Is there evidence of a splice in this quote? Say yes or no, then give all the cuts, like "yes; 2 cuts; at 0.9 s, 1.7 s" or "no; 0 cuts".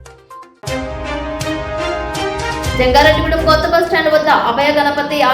yes; 1 cut; at 2.7 s